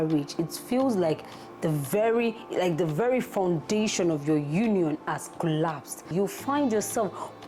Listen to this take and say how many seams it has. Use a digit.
1